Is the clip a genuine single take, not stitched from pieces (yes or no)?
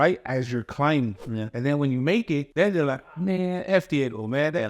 no